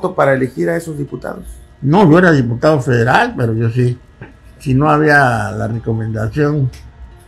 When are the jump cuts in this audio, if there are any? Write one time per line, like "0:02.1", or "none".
none